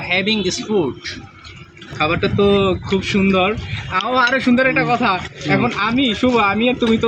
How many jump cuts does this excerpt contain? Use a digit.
1